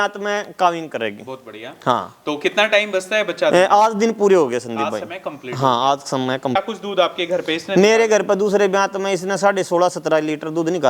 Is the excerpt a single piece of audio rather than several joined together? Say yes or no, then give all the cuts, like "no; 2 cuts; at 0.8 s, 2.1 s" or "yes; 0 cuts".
no; 1 cut; at 6.5 s